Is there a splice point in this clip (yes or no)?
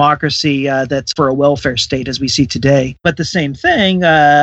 yes